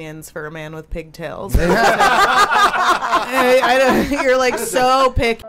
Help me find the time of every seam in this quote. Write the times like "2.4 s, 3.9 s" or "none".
none